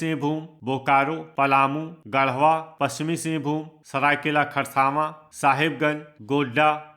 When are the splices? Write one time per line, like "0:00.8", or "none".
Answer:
0:01.4
0:02.7
0:03.8
0:05.2